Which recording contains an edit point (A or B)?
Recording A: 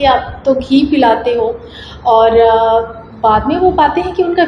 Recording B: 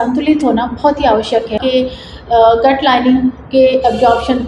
B